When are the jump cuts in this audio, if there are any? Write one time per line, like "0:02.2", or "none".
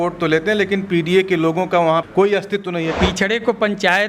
0:02.9